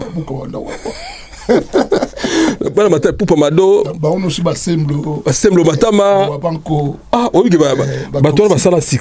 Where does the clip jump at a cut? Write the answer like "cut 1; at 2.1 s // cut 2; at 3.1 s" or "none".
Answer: cut 1; at 2.7 s